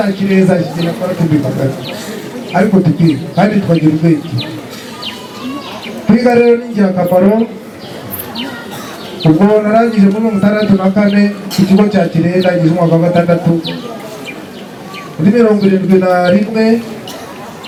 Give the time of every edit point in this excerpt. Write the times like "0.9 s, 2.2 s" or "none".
none